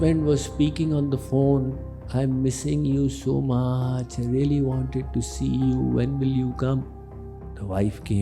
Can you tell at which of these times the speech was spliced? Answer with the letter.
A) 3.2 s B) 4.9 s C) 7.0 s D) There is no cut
C